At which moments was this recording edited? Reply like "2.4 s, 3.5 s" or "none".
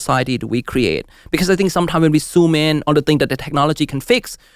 2.8 s